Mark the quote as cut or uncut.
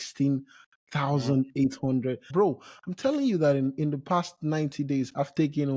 cut